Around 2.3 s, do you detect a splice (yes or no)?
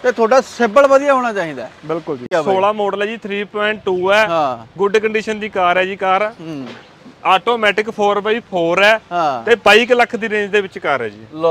yes